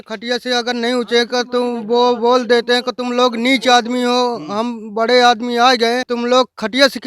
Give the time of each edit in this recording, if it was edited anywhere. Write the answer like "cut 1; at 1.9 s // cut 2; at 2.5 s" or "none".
cut 1; at 6.1 s